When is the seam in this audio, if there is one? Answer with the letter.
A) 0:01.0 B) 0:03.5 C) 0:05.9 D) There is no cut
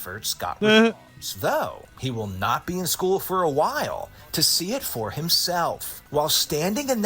C